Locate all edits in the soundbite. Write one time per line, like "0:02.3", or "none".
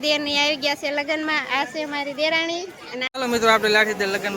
0:03.1